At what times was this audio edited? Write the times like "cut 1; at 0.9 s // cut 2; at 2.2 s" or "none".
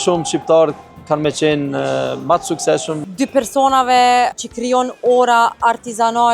cut 1; at 2.9 s // cut 2; at 4.3 s